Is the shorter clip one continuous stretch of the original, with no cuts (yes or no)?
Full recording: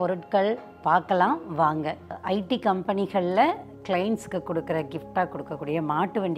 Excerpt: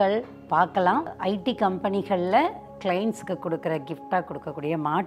no